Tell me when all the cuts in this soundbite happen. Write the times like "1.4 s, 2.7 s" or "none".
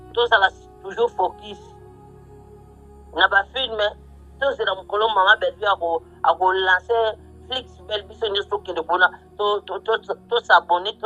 1.6 s, 3.1 s

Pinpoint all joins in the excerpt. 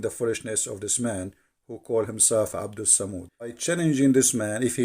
3.6 s

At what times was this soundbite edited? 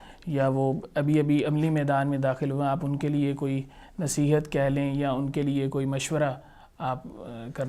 none

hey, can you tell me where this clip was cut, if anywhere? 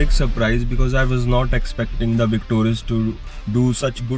none

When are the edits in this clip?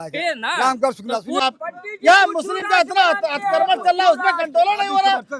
1.4 s

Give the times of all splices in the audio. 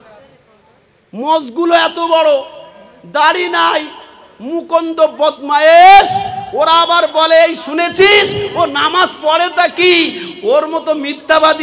none

